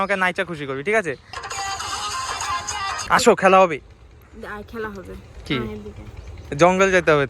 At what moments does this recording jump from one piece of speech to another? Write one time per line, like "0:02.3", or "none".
0:01.3
0:03.1